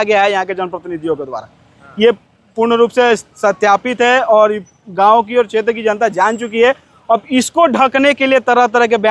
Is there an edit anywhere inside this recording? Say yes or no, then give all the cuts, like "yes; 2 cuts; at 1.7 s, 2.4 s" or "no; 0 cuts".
no; 0 cuts